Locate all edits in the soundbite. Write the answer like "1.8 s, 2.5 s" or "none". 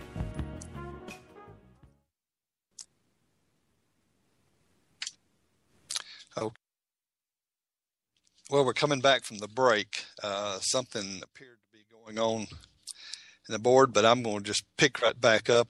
none